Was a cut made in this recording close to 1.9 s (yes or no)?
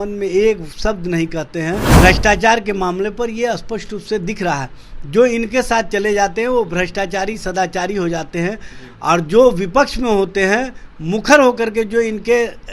yes